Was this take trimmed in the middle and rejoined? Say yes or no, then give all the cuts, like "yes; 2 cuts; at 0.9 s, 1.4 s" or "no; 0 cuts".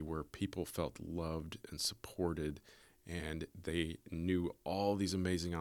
no; 0 cuts